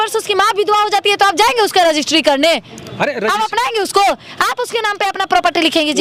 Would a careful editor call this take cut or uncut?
uncut